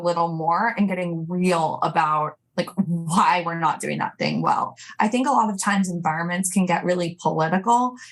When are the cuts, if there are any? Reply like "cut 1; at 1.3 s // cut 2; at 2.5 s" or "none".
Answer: cut 1; at 4.8 s